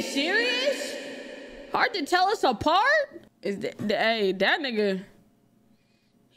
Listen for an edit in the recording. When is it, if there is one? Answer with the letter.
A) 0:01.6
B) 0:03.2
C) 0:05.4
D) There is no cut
B